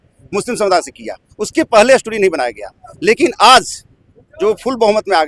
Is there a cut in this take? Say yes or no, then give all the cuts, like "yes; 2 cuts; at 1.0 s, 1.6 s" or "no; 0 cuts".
no; 0 cuts